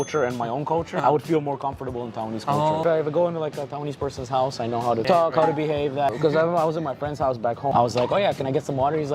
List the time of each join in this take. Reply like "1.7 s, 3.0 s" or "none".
1.0 s, 2.8 s, 5.0 s, 6.1 s, 7.7 s

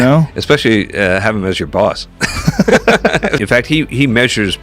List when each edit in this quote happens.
3.4 s

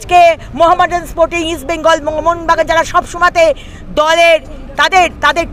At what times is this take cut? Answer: none

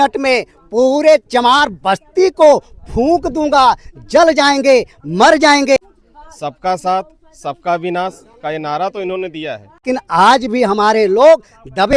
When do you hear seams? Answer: 5.8 s, 9.8 s

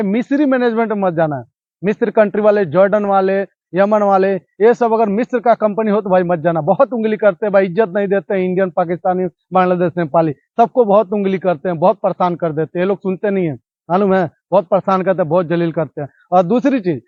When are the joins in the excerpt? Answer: none

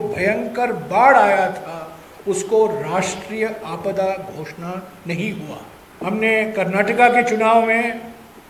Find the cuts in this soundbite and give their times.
5.8 s

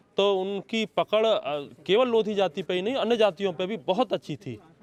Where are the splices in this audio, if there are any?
none

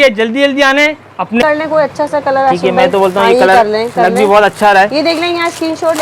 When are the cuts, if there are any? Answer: 1.4 s

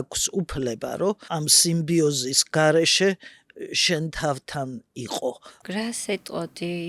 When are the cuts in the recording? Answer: 1.2 s, 5.5 s

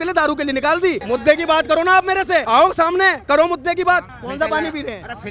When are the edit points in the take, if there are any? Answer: 1.0 s, 2.5 s, 4.2 s

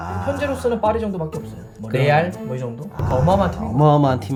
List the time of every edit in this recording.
none

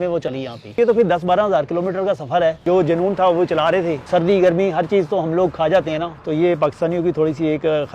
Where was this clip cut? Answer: 0.8 s, 2.6 s, 4.0 s, 6.1 s

